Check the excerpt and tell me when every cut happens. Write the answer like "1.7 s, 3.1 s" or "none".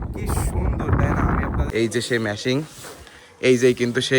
1.7 s